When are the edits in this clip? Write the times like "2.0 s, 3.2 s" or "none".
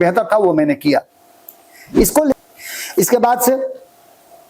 2.3 s